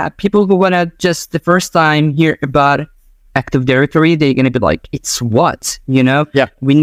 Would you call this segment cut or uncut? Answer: uncut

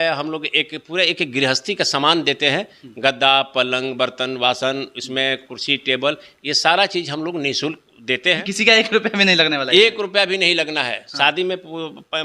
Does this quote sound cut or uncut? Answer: cut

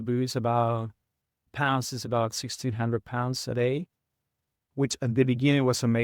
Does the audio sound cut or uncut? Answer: cut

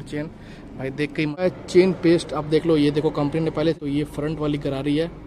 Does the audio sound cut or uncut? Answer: cut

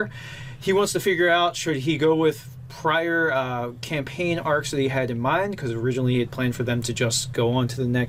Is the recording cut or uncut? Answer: uncut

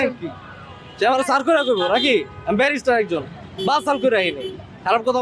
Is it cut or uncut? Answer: uncut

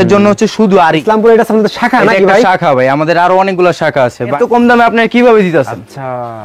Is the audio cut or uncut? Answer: cut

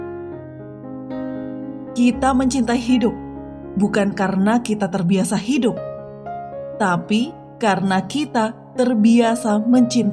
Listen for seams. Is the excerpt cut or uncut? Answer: cut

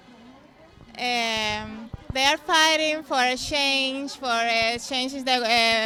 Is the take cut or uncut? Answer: uncut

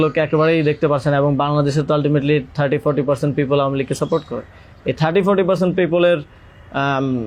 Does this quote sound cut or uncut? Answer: uncut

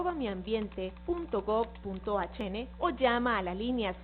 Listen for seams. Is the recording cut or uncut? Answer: cut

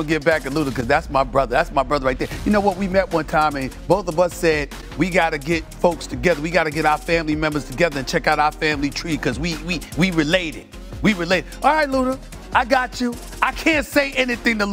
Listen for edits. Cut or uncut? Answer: uncut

